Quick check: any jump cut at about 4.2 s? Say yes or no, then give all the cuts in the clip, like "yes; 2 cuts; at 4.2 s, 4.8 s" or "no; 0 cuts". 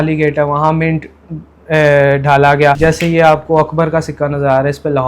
no; 1 cut; at 2.8 s